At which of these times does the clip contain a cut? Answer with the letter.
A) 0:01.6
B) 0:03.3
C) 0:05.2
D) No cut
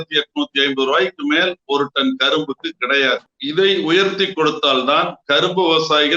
B